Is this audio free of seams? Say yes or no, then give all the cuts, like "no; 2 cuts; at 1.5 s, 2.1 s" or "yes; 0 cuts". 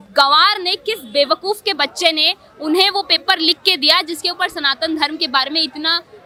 yes; 0 cuts